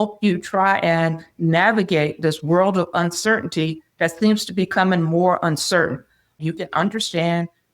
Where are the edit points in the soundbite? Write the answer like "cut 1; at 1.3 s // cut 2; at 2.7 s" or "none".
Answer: cut 1; at 6.4 s